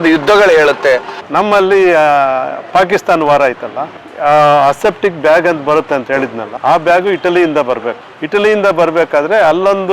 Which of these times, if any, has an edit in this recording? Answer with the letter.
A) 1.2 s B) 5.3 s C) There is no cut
A